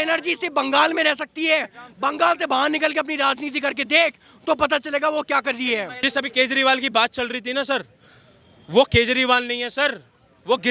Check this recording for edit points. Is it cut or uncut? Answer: cut